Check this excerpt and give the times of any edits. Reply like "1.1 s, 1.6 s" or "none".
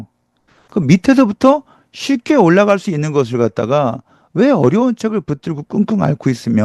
none